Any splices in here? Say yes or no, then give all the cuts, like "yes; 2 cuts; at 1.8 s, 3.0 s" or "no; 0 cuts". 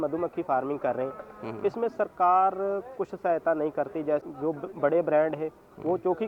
yes; 1 cut; at 4.3 s